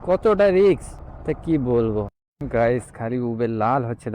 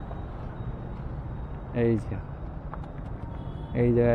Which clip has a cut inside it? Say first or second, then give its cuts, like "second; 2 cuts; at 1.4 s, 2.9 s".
first; 1 cut; at 2.2 s